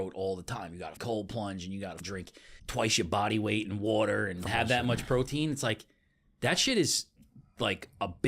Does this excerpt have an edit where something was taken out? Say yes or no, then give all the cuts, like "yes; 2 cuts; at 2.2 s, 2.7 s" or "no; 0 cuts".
yes; 3 cuts; at 1.0 s, 2.3 s, 4.5 s